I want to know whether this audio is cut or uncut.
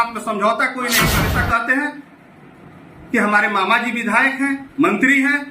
cut